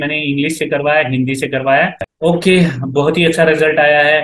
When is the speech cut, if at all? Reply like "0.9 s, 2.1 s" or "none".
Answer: 2.0 s